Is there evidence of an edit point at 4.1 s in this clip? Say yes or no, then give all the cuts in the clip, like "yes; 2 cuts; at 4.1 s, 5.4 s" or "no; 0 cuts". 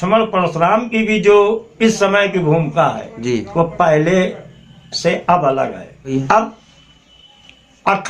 no; 1 cut; at 6.0 s